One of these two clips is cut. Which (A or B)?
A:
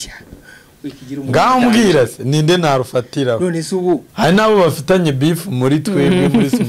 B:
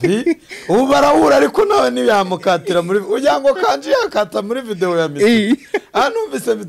A